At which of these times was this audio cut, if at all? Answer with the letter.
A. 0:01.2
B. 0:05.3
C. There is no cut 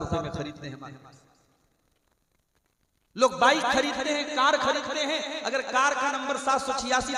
C